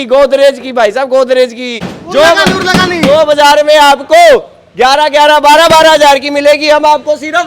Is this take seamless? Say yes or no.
no